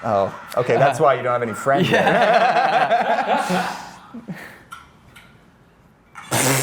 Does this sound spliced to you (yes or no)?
no